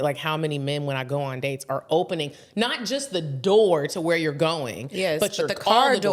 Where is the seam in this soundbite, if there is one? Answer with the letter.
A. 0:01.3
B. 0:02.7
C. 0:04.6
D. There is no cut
D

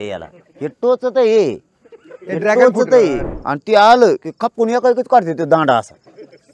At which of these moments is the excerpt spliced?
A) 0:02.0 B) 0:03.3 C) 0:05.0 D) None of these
B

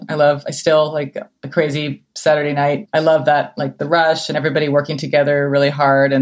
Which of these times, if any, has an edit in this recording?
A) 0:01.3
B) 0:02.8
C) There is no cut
B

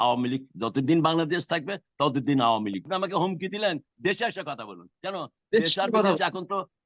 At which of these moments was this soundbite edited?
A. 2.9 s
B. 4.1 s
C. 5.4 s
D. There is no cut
A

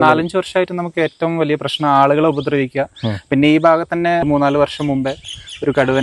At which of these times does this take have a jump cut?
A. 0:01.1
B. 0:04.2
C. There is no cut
B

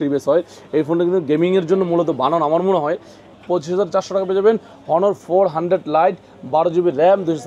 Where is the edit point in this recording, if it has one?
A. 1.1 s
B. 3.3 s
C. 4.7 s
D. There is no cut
B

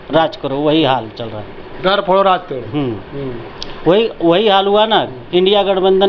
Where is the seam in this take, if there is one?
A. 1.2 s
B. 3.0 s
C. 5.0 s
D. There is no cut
D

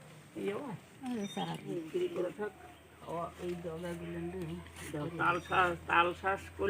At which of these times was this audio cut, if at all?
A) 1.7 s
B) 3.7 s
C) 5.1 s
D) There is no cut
A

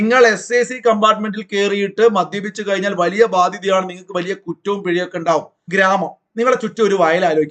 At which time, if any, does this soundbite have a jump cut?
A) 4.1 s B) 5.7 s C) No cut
B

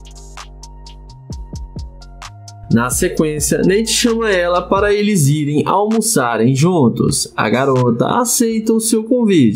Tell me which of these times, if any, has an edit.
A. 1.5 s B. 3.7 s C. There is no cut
A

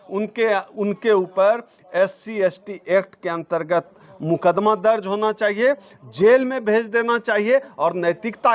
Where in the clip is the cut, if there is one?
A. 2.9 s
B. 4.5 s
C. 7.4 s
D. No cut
D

